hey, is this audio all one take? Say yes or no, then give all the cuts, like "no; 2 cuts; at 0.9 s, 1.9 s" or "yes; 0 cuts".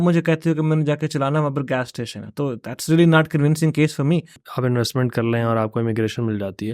no; 1 cut; at 4.4 s